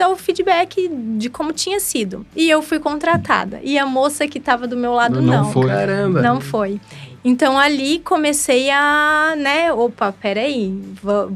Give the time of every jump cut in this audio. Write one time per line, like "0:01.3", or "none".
none